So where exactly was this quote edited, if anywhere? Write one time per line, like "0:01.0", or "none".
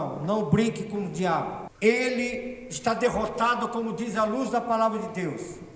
0:01.6